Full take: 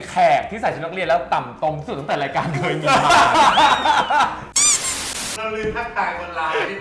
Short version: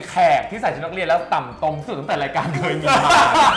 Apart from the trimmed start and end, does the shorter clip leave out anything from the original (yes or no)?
no